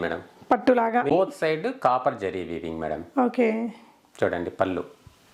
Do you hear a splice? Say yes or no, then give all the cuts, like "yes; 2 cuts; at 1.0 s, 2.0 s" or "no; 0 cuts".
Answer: yes; 1 cut; at 1.1 s